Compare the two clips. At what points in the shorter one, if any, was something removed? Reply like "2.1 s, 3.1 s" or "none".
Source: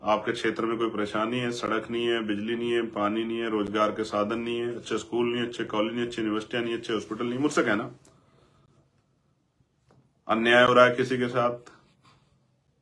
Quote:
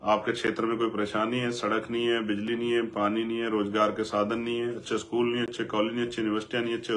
none